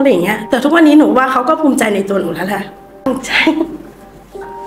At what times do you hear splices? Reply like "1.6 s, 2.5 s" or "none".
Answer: 3.0 s